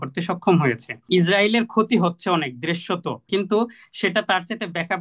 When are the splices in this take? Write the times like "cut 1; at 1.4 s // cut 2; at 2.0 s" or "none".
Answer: cut 1; at 1.1 s // cut 2; at 3.2 s